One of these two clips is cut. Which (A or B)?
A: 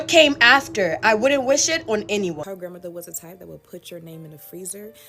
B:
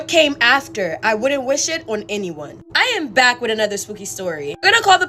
A